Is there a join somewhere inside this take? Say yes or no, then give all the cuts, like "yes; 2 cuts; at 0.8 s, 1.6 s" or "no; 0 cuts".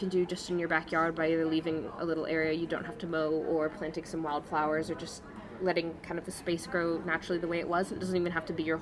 no; 0 cuts